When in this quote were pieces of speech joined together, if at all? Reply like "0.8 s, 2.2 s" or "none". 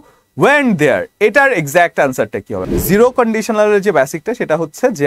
2.6 s